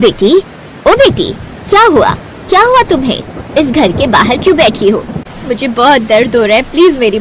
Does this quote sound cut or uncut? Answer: cut